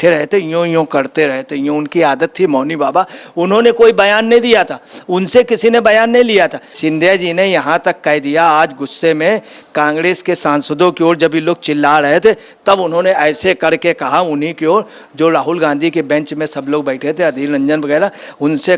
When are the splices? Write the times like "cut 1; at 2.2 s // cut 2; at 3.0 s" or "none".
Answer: cut 1; at 6.7 s